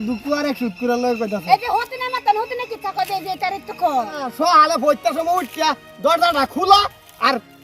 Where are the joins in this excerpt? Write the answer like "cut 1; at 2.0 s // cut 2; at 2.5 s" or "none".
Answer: cut 1; at 4.2 s